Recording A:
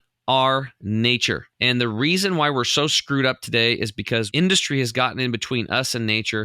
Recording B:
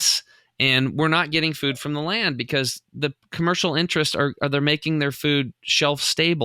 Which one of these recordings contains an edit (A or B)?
A